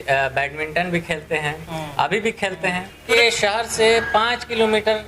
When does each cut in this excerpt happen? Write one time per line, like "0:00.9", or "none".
0:03.1